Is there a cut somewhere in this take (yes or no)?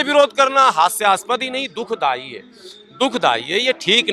no